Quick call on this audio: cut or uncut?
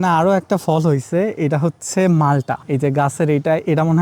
uncut